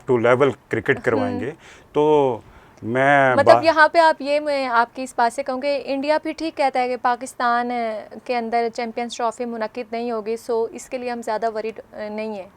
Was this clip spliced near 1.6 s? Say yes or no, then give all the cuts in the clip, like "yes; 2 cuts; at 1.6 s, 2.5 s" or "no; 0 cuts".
no; 0 cuts